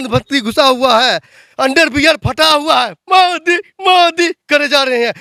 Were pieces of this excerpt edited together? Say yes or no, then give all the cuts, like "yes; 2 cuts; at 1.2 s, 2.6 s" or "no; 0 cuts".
no; 0 cuts